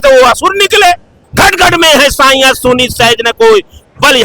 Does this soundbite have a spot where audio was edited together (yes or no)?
yes